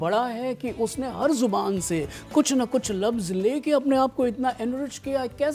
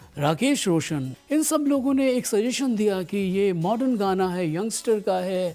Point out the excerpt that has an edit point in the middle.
second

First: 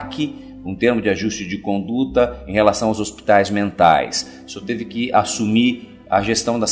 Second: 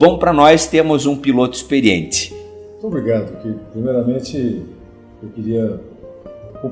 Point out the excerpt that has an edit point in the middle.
first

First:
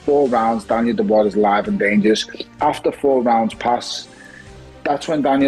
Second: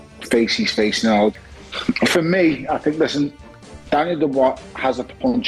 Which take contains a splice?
second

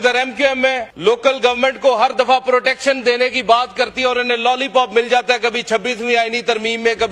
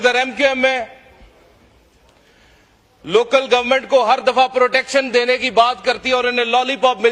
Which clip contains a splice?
first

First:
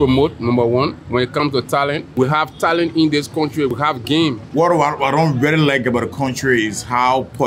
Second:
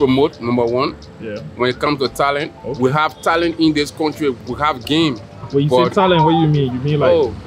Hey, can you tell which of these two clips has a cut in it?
first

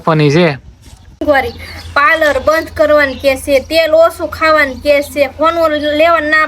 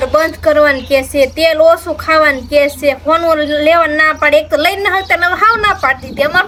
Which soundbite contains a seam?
first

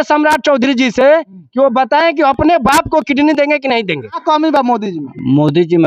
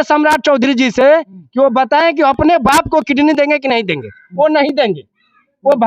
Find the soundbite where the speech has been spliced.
first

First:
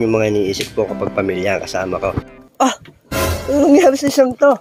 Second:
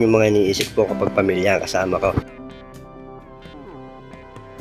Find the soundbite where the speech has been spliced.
first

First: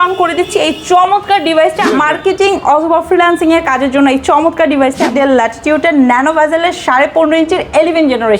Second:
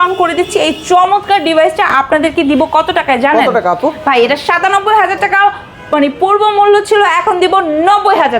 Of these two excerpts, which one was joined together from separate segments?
first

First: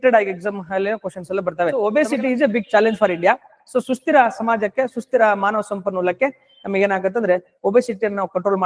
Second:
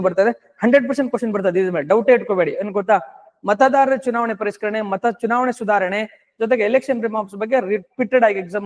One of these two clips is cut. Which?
first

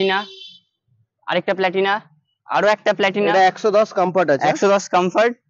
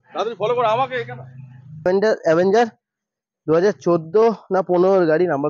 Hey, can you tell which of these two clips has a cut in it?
second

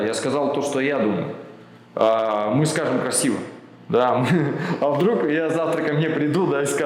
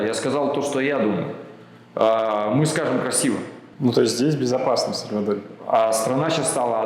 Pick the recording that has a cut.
second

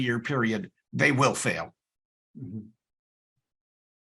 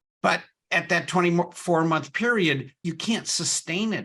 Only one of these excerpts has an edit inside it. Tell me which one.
second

